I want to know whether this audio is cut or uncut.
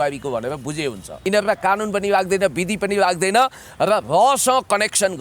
cut